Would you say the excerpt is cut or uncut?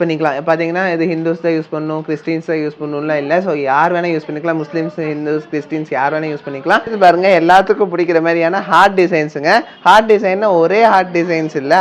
cut